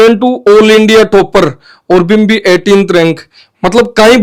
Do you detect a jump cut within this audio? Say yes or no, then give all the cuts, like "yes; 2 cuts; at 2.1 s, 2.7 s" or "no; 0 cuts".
no; 0 cuts